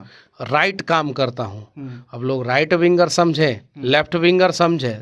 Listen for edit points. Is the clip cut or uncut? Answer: uncut